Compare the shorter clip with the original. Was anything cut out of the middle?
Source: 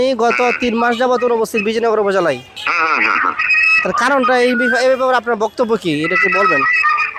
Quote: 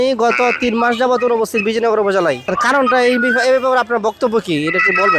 yes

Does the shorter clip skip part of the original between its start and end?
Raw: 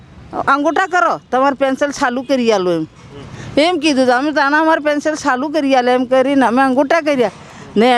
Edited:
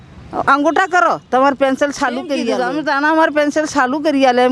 yes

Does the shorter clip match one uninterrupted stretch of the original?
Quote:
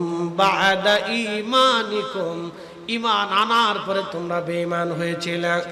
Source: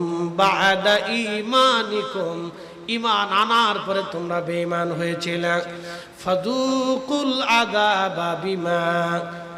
yes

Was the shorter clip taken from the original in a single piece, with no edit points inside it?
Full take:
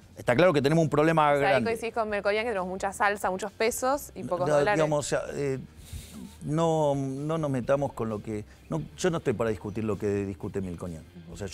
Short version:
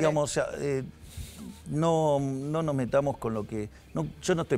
yes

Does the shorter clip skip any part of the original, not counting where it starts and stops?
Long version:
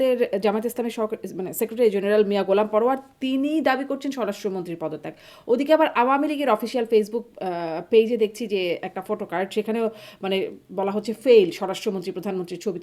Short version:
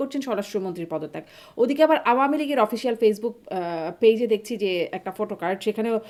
no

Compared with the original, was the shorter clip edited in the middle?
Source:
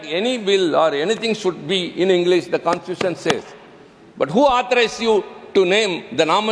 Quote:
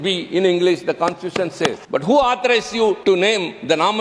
yes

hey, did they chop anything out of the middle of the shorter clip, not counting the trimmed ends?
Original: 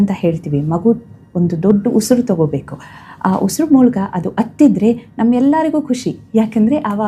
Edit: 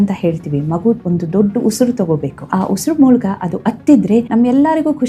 yes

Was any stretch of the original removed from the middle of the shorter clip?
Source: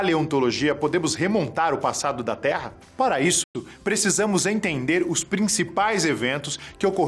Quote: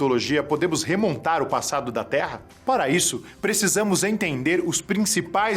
yes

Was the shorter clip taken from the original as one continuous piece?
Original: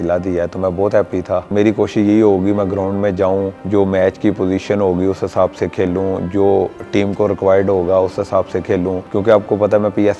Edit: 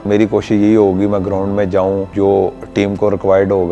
no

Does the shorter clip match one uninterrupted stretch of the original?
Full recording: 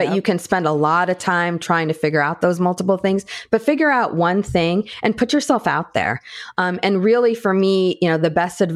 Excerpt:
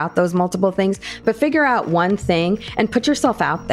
yes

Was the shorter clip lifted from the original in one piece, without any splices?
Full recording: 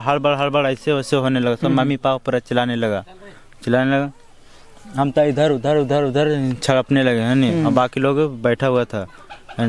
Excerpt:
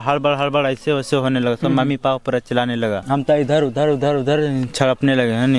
no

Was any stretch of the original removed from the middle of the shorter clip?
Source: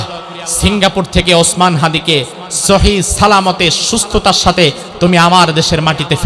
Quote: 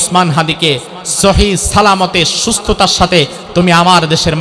no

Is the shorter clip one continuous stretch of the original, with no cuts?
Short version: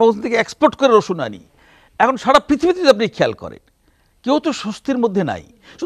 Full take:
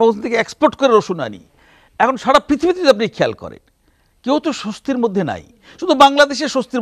yes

